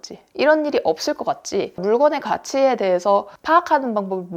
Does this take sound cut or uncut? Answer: cut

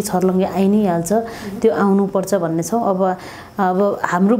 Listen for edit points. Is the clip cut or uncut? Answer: uncut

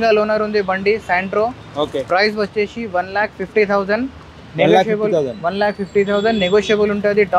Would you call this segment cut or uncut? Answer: uncut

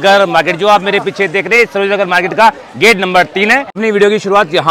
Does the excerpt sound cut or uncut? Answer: cut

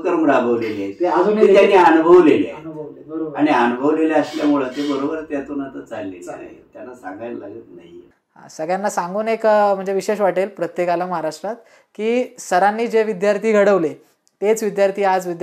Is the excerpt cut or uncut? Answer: uncut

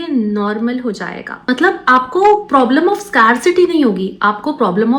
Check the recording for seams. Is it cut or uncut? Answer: cut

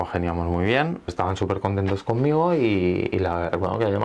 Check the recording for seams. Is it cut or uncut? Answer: cut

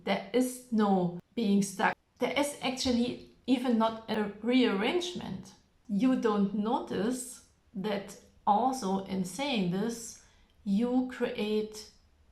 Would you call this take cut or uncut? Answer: cut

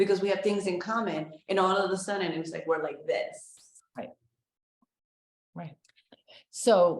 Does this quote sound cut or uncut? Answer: uncut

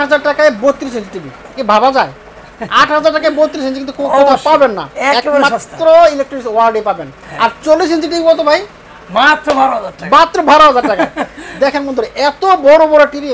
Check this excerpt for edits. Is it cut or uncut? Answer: uncut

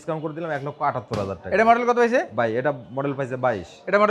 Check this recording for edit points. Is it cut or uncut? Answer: uncut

